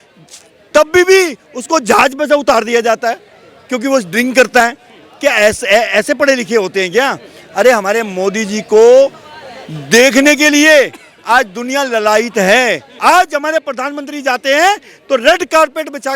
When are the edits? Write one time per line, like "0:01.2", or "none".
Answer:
0:12.9